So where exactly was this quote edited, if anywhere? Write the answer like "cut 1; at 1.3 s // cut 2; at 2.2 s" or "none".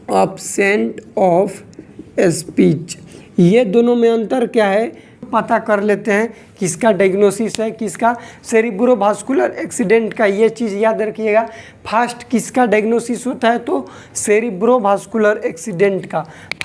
cut 1; at 5.2 s